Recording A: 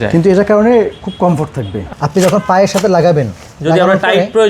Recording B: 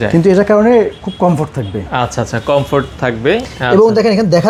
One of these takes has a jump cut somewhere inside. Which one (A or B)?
A